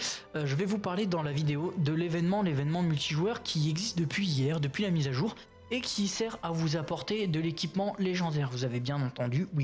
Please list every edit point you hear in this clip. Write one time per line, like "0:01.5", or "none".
none